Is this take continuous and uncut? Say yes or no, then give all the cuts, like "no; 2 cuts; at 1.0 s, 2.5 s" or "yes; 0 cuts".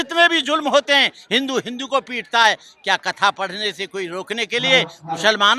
yes; 0 cuts